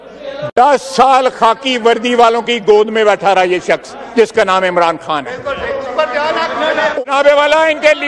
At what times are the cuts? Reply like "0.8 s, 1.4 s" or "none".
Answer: 7.0 s

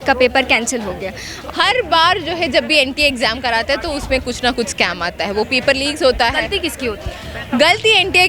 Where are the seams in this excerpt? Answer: 1.3 s

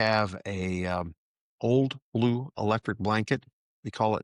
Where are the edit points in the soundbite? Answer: none

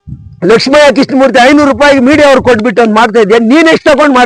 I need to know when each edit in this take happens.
none

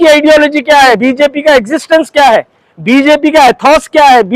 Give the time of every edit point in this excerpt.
1.0 s

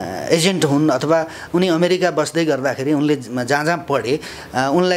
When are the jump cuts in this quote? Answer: none

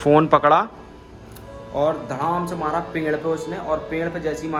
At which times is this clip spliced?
none

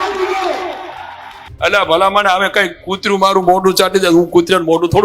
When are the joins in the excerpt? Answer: 1.4 s

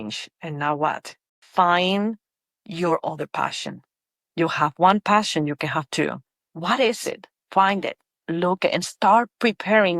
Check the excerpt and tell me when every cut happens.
1.3 s

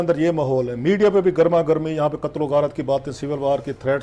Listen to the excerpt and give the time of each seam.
none

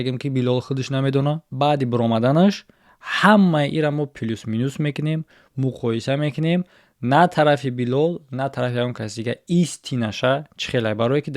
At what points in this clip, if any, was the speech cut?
1.4 s

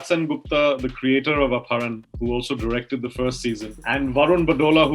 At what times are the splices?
3.7 s

